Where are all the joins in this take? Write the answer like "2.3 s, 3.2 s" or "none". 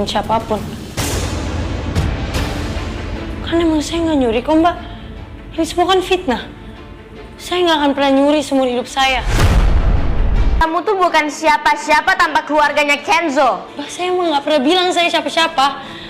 none